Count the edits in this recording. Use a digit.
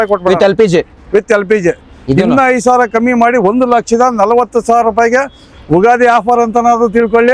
0